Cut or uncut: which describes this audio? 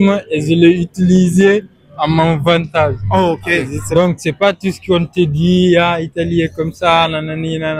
cut